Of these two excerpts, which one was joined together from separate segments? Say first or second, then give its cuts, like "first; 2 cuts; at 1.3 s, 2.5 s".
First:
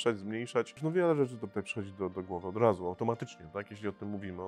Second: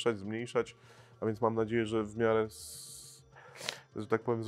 first; 1 cut; at 0.9 s